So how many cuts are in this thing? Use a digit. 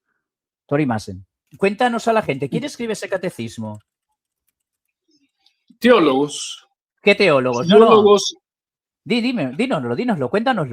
1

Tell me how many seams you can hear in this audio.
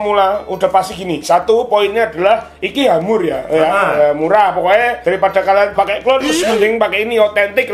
0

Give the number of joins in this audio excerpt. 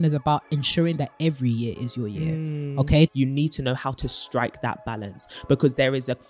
1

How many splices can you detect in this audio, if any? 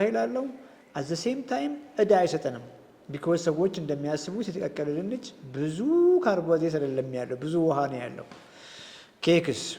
0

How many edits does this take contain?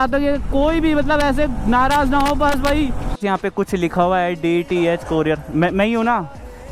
1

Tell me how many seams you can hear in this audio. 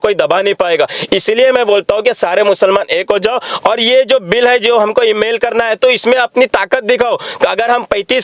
0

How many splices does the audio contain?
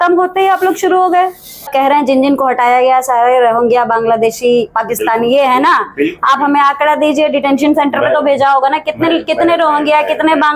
1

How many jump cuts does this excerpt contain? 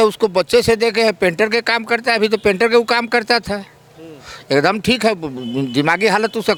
0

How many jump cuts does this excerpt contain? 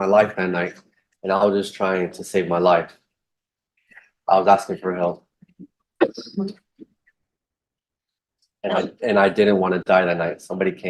0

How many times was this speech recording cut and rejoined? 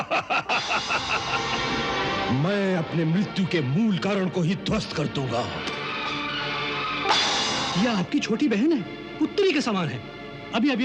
3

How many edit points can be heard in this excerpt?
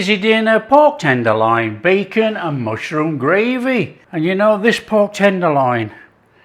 1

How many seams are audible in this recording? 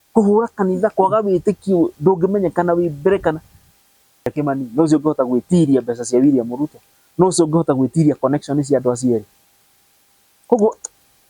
1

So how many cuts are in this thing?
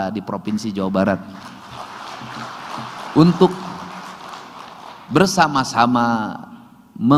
0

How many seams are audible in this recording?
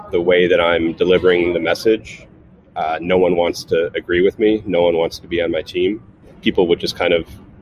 1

